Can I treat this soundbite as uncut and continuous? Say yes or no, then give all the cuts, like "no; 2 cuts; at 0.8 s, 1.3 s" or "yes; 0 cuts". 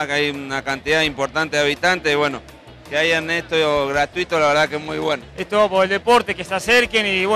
no; 1 cut; at 5.3 s